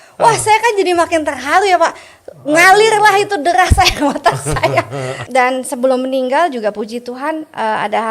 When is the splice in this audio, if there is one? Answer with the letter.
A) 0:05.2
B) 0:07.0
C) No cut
A